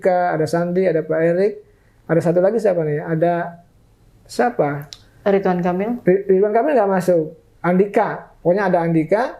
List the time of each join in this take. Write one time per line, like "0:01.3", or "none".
none